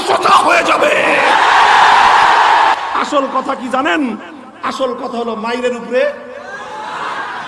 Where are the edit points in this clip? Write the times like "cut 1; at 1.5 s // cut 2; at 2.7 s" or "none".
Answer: cut 1; at 2.9 s